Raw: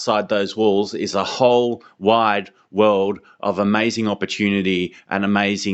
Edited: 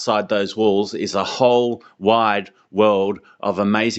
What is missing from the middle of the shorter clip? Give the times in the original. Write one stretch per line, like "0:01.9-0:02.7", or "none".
none